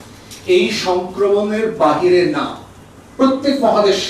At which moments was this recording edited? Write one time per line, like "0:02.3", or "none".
none

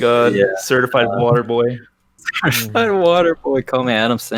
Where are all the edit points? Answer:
none

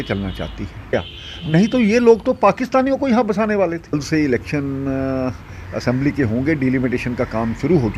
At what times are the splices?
0:00.9
0:04.0

